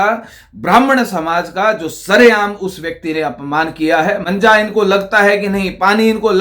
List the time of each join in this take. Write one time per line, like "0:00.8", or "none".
0:04.2